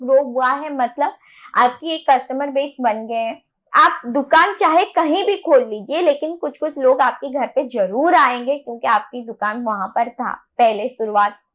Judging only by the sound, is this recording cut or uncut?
uncut